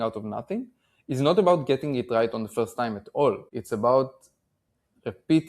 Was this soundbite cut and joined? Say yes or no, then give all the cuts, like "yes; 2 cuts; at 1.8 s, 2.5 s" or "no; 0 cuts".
yes; 1 cut; at 3.5 s